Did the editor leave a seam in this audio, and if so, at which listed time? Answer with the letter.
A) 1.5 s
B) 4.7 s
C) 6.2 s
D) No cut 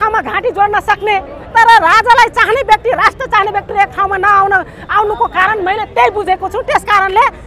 D